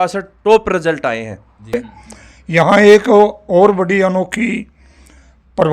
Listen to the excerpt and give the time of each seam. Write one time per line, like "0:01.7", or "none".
0:01.6